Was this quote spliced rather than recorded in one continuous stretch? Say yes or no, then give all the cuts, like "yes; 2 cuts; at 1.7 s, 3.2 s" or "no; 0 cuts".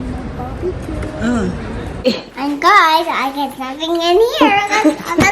yes; 1 cut; at 2.1 s